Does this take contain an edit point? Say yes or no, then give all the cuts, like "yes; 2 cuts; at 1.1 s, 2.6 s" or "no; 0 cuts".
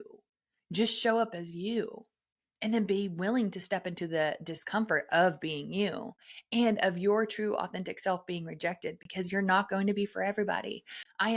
no; 0 cuts